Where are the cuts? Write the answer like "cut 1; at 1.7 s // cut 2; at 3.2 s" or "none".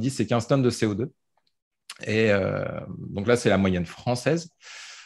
cut 1; at 1.4 s

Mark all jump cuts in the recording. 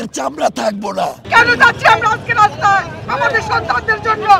cut 1; at 1.2 s

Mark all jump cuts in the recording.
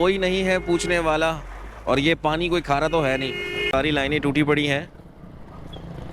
cut 1; at 3.7 s

